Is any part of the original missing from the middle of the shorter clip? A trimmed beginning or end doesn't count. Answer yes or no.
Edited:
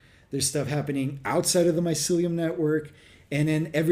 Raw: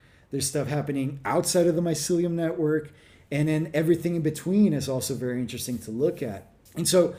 no